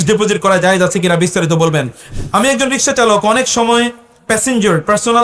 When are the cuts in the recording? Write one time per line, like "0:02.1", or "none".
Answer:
0:02.0